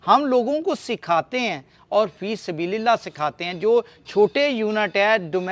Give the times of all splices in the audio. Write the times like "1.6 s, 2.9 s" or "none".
none